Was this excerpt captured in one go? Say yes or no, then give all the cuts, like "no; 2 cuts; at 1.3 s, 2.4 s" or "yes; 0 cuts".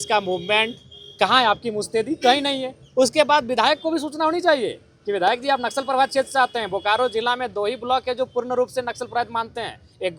yes; 0 cuts